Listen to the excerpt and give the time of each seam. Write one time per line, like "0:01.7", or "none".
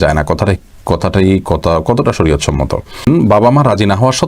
0:03.0